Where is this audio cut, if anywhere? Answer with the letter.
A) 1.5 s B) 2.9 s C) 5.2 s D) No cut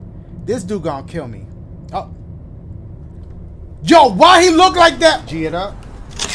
C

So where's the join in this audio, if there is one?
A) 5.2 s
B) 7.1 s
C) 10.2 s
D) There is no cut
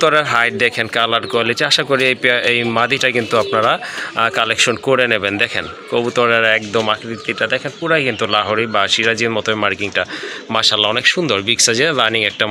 D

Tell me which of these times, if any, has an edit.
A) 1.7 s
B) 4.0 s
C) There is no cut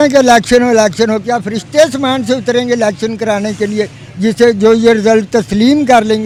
C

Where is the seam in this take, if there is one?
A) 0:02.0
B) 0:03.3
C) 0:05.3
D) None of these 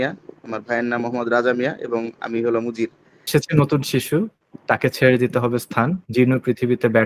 B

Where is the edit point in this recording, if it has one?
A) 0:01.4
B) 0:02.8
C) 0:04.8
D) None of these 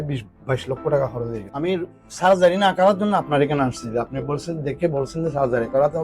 A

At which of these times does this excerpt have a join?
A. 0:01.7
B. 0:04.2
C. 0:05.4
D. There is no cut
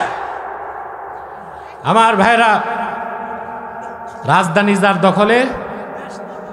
B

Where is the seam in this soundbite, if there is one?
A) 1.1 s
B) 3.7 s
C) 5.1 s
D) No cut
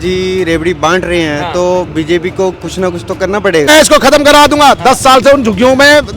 B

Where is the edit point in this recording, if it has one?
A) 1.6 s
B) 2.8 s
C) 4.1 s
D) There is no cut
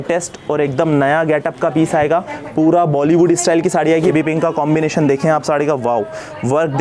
C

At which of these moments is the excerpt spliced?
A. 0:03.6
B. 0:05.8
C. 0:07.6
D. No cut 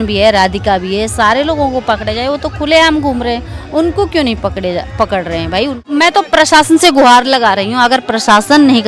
B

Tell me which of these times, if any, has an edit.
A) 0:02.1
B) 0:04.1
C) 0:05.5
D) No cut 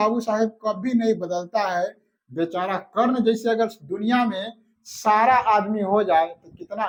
D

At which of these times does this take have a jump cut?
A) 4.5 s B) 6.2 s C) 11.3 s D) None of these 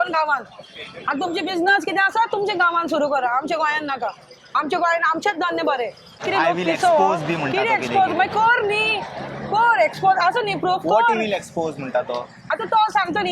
B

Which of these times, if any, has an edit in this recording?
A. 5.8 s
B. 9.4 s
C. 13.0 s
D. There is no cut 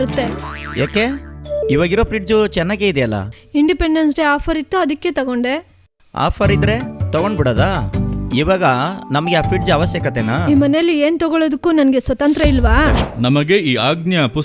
C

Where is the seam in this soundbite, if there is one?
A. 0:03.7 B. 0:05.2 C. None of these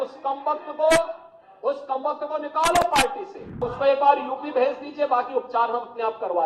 A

